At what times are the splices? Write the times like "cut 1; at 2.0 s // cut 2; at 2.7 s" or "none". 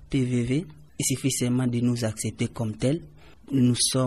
none